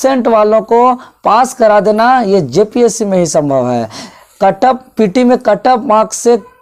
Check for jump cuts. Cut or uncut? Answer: uncut